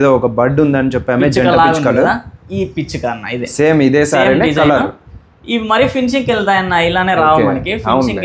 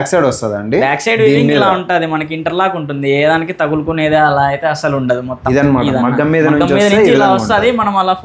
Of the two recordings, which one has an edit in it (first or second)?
second